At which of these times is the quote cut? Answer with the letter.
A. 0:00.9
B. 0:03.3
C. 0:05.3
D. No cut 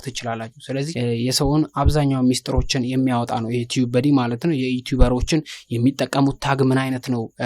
A